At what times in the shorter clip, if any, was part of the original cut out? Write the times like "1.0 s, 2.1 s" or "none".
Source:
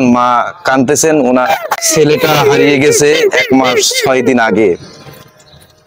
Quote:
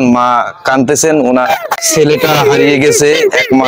none